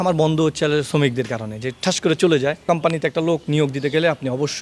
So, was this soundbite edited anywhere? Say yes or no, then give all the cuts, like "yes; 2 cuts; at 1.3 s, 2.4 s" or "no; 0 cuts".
yes; 1 cut; at 2.6 s